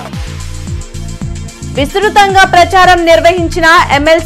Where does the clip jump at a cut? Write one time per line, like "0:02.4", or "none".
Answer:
0:01.5